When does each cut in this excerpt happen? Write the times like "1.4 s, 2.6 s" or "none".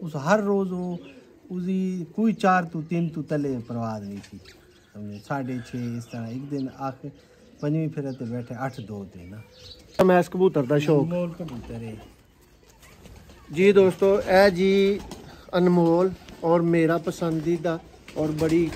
10.0 s